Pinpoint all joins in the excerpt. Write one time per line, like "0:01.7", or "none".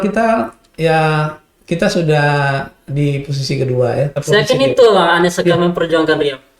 0:04.2